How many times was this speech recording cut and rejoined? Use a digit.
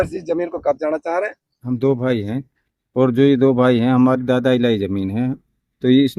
1